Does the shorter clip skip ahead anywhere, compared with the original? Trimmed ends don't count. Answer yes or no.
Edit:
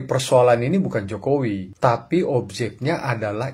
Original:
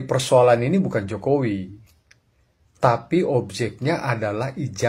yes